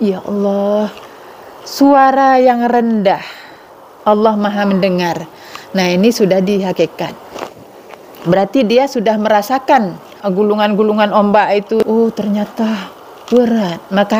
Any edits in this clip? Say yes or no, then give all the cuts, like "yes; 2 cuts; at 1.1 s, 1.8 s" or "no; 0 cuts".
yes; 2 cuts; at 10.1 s, 11.8 s